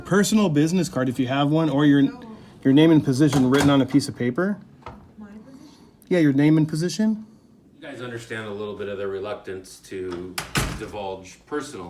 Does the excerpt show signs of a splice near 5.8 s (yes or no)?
no